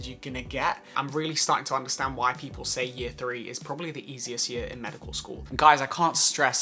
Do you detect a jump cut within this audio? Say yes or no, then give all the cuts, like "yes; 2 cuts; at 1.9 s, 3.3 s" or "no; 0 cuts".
yes; 2 cuts; at 1.0 s, 5.4 s